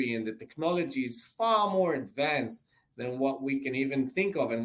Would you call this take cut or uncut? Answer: uncut